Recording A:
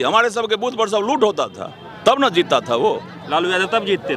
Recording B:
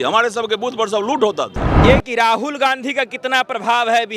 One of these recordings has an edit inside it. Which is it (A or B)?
B